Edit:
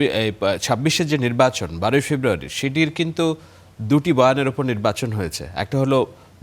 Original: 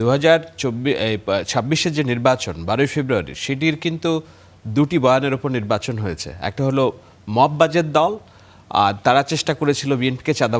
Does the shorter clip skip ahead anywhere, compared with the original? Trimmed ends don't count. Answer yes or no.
no